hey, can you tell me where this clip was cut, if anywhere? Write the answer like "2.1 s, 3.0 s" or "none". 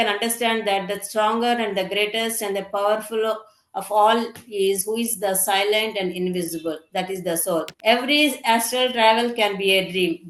7.7 s